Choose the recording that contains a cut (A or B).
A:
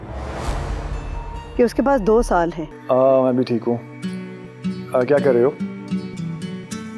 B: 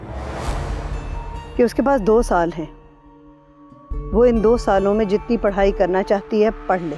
A